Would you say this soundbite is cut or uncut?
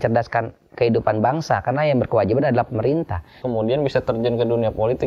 cut